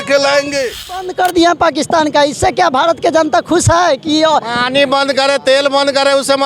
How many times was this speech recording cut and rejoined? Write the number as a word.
one